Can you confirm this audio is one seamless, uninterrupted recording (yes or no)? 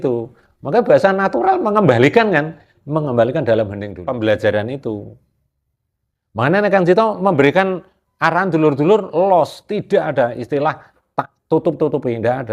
no